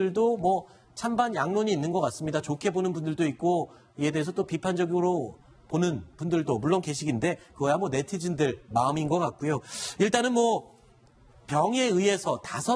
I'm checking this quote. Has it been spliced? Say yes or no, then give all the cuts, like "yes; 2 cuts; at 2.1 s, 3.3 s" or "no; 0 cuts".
no; 0 cuts